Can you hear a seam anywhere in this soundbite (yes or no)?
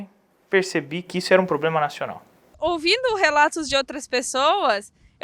yes